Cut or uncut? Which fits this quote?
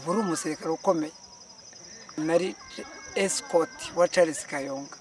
cut